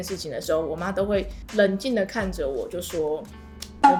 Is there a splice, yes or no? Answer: no